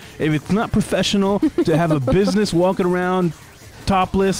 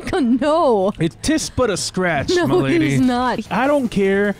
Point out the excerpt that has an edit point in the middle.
second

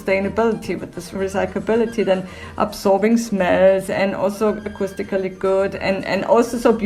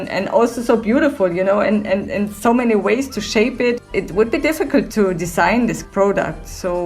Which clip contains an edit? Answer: second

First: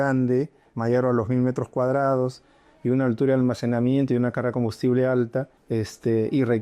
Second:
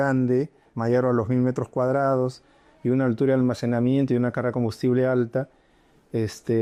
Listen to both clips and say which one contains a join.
first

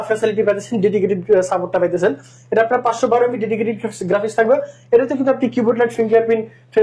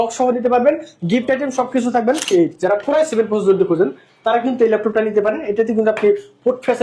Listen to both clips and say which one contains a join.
second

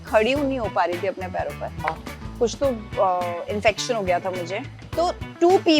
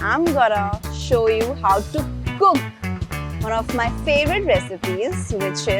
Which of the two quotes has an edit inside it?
first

